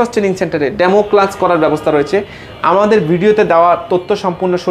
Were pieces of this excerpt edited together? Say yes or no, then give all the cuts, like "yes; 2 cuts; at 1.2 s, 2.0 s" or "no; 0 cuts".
no; 0 cuts